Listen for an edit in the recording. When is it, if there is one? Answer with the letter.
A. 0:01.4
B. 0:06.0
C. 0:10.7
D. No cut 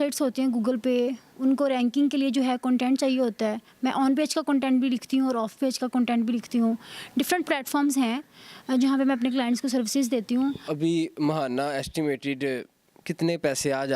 C